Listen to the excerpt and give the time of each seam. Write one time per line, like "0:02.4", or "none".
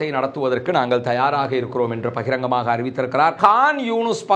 0:03.4

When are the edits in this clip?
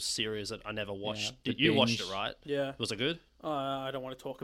0:02.8

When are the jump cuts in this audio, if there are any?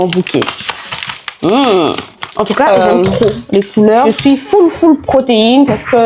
0:04.1

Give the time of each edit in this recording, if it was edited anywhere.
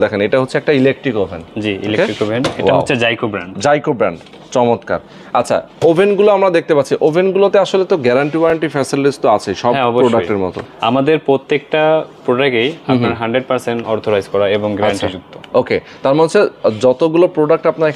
none

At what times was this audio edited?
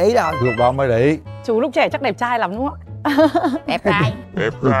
0:01.3

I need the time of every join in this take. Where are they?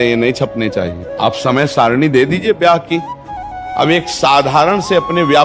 0:01.0
0:03.6

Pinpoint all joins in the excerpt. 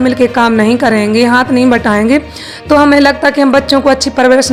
none

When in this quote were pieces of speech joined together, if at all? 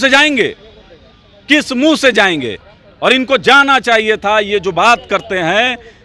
none

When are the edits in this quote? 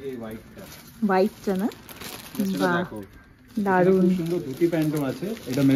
0:04.0

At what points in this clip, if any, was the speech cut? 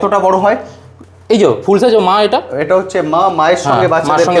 none

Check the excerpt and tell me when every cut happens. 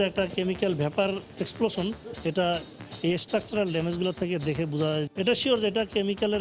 none

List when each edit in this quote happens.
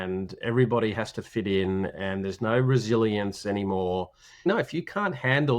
0:04.2

